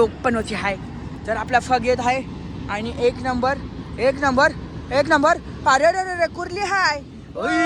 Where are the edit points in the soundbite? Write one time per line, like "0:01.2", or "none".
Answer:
none